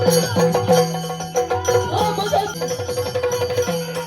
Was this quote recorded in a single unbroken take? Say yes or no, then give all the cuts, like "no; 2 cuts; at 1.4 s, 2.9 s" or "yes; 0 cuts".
no; 1 cut; at 2.5 s